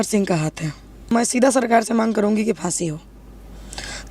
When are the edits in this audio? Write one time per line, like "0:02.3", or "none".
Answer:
0:01.1